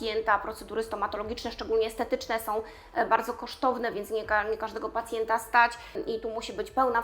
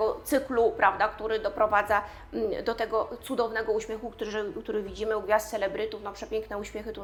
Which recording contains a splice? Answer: first; 1 cut; at 6.0 s

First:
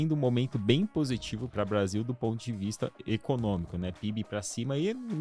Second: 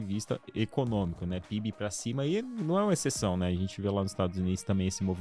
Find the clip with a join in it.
first; 1 cut; at 1.5 s

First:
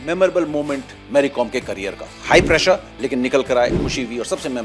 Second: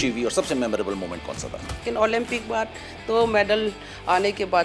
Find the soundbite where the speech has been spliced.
second; 1 cut; at 1.8 s

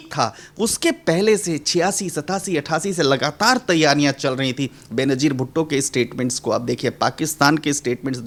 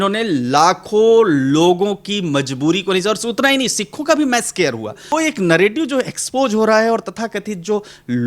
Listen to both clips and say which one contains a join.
second; 1 cut; at 5.1 s

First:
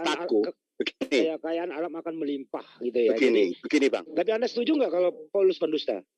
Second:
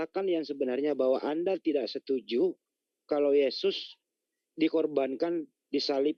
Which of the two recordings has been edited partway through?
first; 1 cut; at 4.0 s

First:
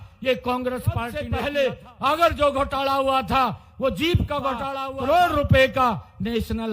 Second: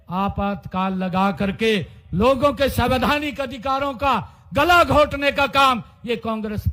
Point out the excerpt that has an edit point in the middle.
first; 2 cuts; at 1.2 s, 4.8 s

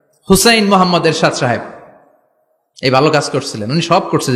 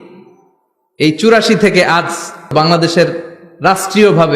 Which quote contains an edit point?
second; 1 cut; at 2.5 s

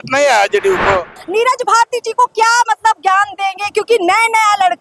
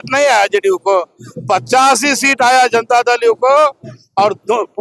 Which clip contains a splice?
first; 1 cut; at 1.2 s

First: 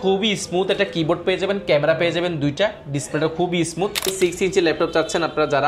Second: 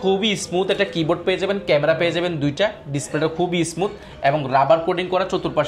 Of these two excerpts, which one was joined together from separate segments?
first; 1 cut; at 4.1 s

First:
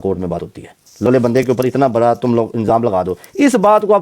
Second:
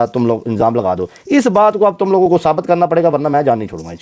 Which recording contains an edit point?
first; 1 cut; at 1.1 s

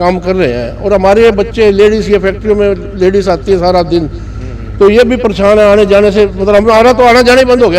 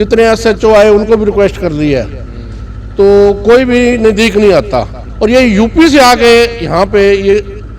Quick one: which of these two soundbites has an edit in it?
second; 1 cut; at 5.0 s

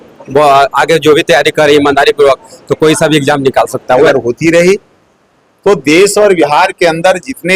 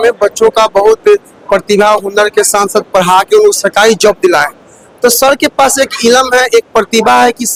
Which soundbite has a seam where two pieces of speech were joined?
first; 1 cut; at 4.0 s

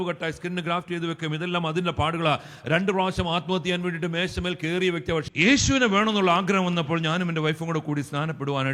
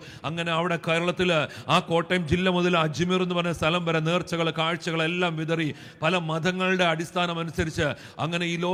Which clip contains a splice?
first; 1 cut; at 5.5 s

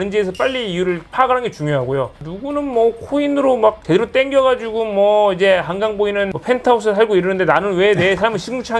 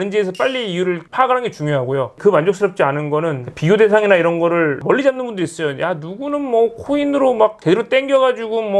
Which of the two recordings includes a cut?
first; 1 cut; at 2.2 s

